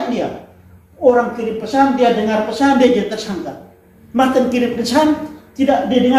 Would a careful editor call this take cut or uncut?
uncut